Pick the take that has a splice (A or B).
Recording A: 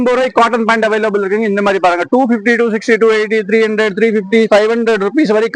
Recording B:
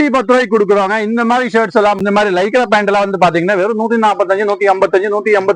B